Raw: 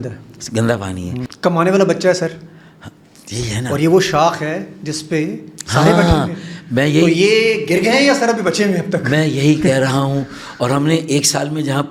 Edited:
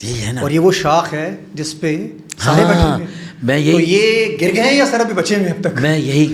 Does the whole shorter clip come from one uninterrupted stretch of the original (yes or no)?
yes